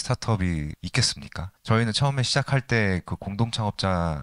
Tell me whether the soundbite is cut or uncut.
cut